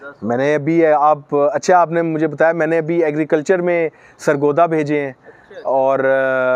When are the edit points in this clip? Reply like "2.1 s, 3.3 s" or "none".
none